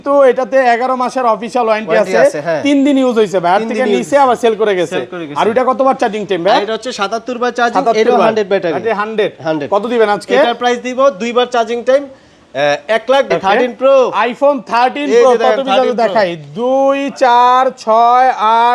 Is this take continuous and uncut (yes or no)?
no